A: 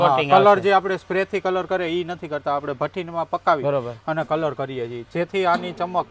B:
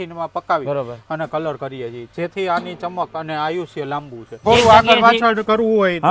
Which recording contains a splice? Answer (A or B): B